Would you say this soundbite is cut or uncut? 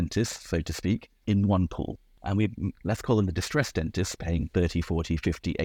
cut